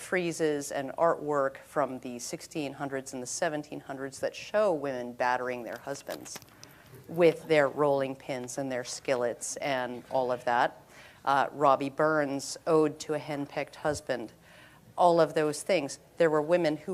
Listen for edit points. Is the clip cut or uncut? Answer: cut